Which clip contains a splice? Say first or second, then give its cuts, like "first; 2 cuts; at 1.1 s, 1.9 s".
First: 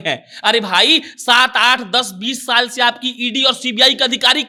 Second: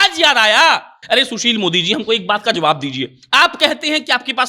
second; 1 cut; at 0.9 s